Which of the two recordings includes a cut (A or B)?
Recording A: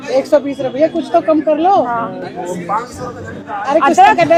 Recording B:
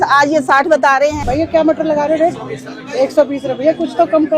B